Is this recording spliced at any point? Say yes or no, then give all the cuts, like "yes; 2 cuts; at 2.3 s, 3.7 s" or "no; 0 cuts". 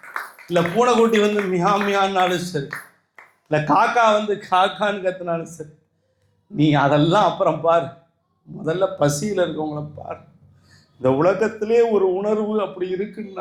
no; 0 cuts